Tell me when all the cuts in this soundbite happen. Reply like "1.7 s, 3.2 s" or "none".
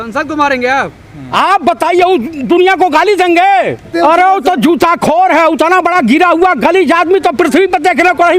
3.9 s

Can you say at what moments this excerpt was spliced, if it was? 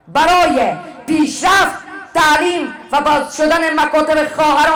none

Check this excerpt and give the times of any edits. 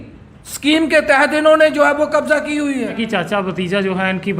3.0 s

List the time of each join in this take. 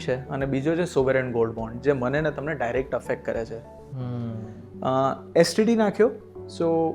none

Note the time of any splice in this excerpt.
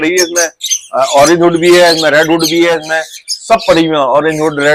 none

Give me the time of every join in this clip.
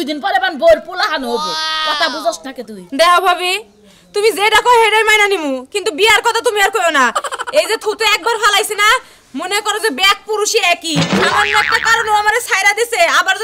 none

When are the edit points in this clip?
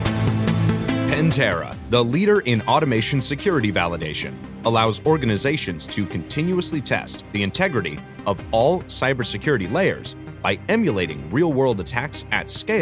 1.1 s

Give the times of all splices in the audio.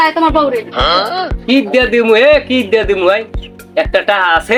none

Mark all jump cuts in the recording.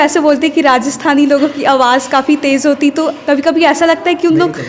none

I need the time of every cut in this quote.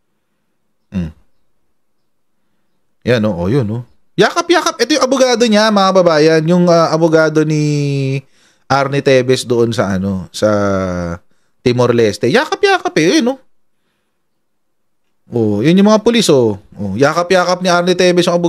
none

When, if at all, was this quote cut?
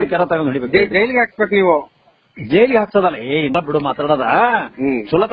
3.5 s

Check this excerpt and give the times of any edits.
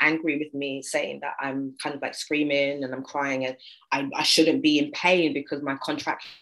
none

